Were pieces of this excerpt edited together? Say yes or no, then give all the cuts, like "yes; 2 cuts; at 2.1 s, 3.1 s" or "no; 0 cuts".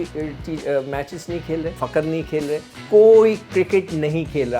yes; 2 cuts; at 1.7 s, 2.7 s